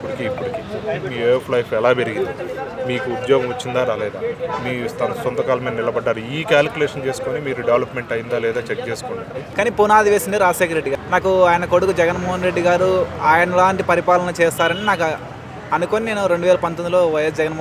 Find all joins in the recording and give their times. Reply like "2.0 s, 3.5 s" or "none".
9.4 s, 10.9 s